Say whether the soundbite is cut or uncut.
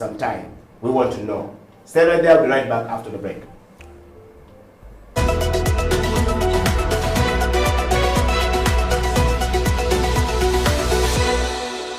cut